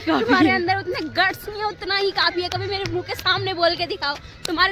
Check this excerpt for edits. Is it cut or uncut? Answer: uncut